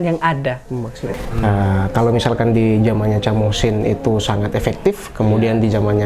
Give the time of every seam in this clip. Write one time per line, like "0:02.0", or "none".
0:01.1